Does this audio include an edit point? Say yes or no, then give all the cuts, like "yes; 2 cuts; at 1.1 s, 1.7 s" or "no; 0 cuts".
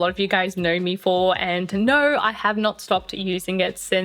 no; 0 cuts